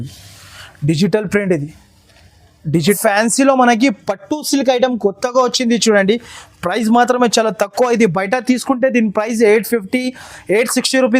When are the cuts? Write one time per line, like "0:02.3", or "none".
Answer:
0:03.0